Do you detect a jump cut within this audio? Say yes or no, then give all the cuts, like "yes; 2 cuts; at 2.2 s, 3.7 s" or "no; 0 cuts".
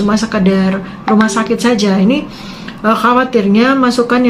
no; 0 cuts